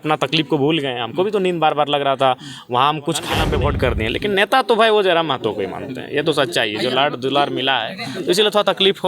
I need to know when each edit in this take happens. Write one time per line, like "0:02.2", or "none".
0:03.4